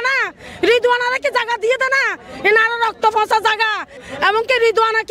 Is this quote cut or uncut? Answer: cut